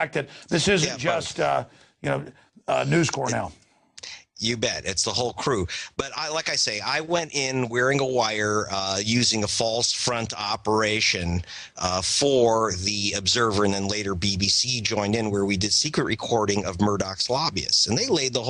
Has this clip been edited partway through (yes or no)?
no